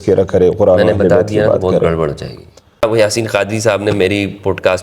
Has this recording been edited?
yes; 1 cut; at 2.8 s

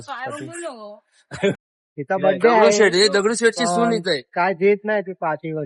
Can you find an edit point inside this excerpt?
yes; 1 cut; at 1.6 s

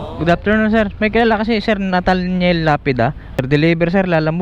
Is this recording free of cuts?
no; 1 cut; at 3.4 s

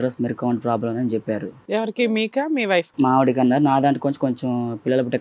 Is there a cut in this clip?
no; 0 cuts

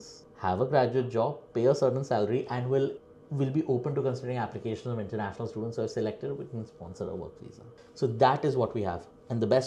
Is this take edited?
no; 0 cuts

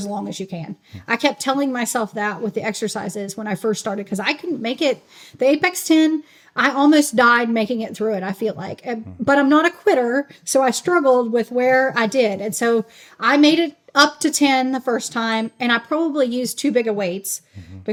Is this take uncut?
yes; 0 cuts

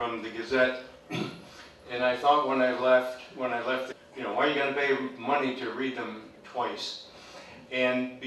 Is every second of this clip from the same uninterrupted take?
yes; 0 cuts

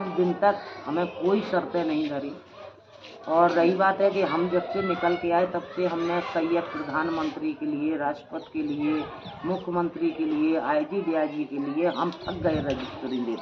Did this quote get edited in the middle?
no; 0 cuts

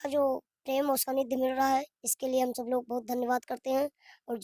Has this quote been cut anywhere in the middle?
no; 0 cuts

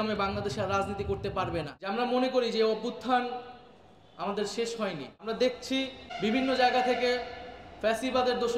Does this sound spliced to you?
yes; 3 cuts; at 1.8 s, 5.1 s, 6.1 s

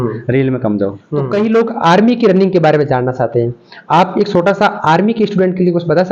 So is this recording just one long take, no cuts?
no; 1 cut; at 1.3 s

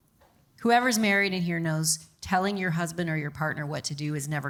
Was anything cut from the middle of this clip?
no; 0 cuts

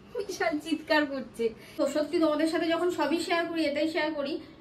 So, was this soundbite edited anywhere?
yes; 1 cut; at 1.6 s

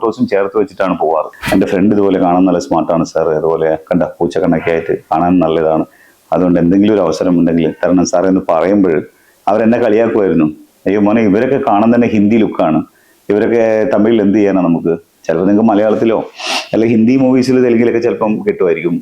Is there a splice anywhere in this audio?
yes; 1 cut; at 1.4 s

